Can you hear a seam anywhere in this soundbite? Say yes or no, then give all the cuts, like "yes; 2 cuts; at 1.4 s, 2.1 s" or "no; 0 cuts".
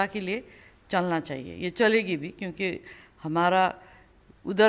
no; 0 cuts